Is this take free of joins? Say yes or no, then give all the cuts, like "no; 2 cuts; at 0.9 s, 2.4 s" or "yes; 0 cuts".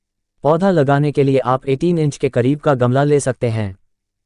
yes; 0 cuts